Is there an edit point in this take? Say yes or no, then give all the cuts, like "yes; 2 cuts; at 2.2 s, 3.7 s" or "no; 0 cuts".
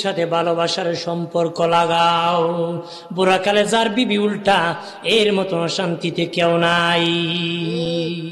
no; 0 cuts